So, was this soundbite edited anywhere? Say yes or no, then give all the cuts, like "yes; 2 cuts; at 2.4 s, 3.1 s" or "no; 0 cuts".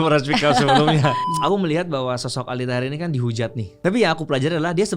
yes; 2 cuts; at 1.3 s, 3.8 s